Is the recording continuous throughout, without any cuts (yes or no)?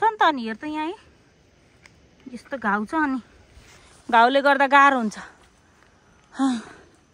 yes